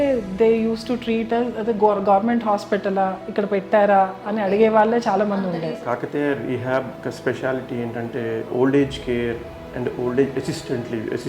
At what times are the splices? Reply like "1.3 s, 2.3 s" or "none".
5.5 s, 6.9 s, 8.5 s